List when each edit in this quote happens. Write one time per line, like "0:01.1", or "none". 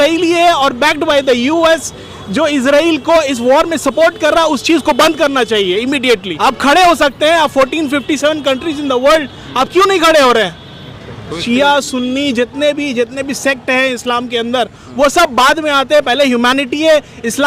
0:06.3
0:11.3